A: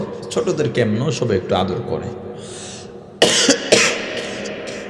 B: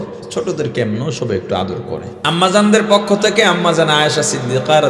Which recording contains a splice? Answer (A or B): B